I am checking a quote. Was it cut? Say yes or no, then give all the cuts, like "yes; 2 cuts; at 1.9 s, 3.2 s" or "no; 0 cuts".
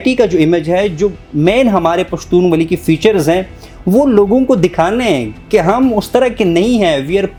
no; 0 cuts